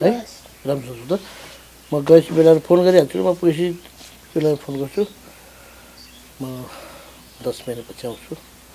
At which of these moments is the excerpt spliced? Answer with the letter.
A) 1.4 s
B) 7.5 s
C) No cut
C